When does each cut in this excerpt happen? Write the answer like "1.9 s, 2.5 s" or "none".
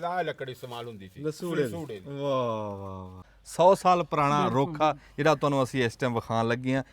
3.3 s